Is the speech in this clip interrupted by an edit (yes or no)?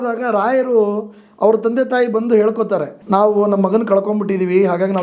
yes